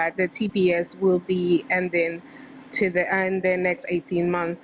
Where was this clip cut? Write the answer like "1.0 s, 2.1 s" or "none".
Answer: none